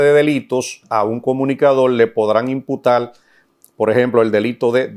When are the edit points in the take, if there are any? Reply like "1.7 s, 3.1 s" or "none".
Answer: none